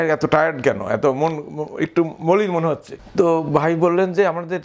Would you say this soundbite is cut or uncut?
cut